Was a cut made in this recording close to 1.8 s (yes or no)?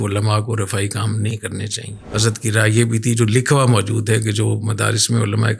no